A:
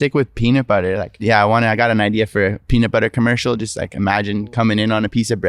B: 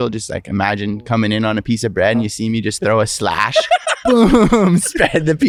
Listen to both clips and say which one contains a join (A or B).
A